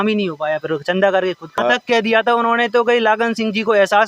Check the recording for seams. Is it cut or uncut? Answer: cut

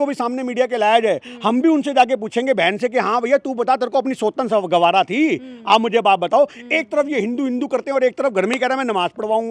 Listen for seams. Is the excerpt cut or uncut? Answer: uncut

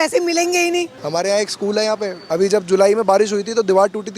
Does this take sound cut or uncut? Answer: cut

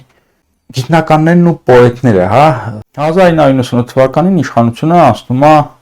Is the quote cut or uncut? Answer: cut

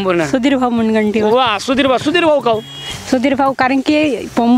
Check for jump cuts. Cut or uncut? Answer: uncut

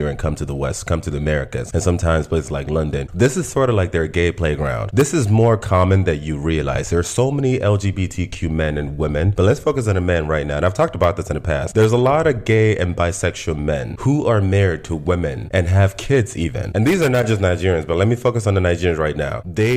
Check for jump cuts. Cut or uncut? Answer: cut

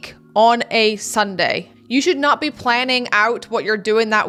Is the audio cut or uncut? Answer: uncut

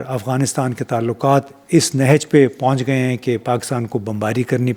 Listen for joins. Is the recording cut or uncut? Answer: uncut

